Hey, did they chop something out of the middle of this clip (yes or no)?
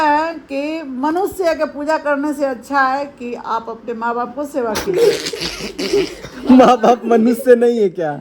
no